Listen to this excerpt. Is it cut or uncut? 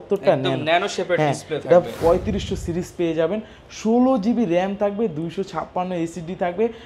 cut